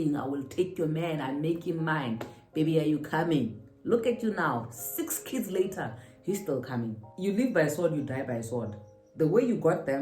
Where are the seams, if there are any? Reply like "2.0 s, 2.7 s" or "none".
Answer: 7.1 s